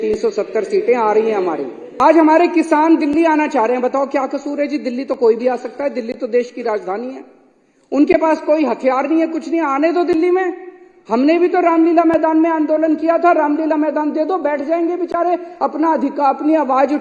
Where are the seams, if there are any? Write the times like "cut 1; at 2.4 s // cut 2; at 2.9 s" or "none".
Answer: cut 1; at 1.8 s